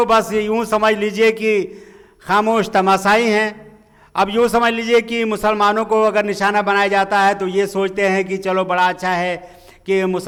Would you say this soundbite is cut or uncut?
uncut